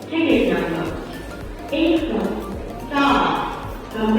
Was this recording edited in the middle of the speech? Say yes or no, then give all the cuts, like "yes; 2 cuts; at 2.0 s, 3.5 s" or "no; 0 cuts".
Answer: no; 0 cuts